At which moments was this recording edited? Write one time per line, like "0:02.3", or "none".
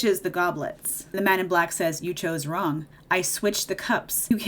0:01.0
0:02.9